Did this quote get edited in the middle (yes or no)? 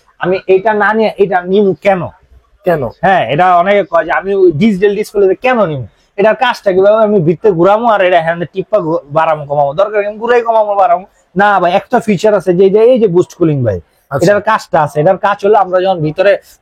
no